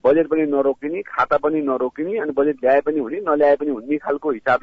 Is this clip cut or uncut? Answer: uncut